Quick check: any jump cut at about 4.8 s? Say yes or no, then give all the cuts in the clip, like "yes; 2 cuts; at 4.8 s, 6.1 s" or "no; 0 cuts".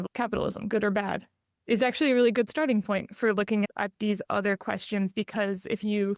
no; 0 cuts